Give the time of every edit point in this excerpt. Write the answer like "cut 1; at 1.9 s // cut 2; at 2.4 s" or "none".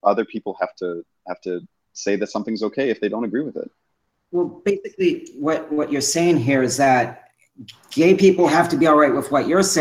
cut 1; at 8.5 s